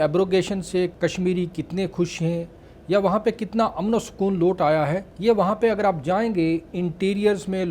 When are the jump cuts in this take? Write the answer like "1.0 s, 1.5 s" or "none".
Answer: 0.9 s, 5.1 s